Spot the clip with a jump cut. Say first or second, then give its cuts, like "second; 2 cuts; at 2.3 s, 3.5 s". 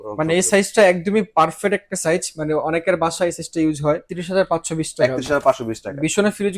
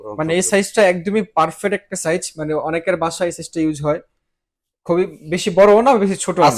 first; 1 cut; at 4.1 s